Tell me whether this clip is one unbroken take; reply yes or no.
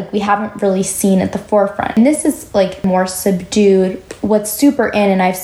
no